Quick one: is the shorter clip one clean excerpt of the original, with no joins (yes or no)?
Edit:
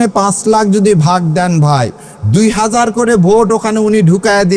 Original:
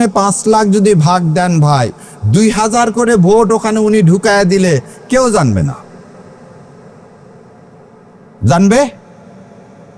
yes